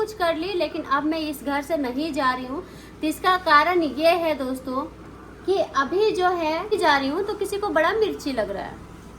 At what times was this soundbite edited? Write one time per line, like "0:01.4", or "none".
0:06.7

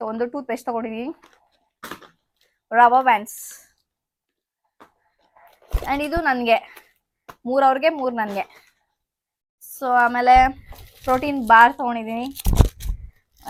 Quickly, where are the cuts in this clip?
none

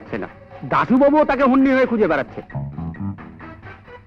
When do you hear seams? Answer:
none

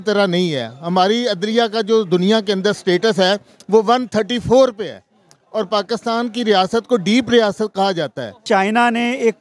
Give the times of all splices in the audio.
0:08.4

